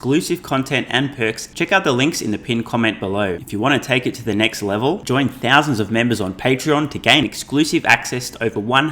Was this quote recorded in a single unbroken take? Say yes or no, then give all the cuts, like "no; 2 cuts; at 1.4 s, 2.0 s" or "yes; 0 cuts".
no; 2 cuts; at 1.5 s, 3.4 s